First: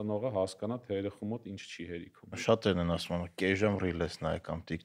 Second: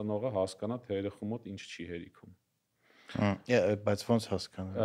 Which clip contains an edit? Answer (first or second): first